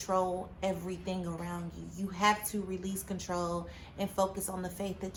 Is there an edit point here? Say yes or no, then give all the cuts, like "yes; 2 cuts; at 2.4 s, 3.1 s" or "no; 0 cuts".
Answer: no; 0 cuts